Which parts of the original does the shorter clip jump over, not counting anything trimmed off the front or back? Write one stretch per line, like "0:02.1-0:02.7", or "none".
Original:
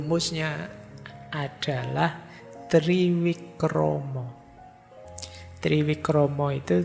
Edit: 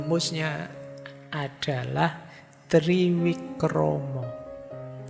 none